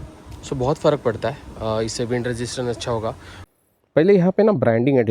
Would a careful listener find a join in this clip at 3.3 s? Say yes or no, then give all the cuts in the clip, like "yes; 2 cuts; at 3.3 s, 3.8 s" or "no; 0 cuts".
yes; 1 cut; at 3.3 s